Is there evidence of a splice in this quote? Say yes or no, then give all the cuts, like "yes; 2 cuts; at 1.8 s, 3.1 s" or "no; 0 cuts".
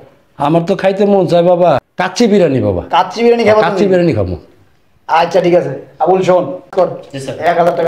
yes; 2 cuts; at 1.9 s, 6.7 s